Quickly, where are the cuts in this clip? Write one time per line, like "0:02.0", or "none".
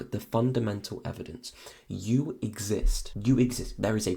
0:03.0